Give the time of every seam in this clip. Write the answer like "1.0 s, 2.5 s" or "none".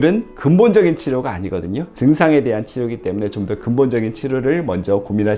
none